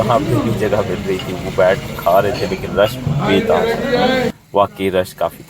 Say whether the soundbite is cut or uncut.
uncut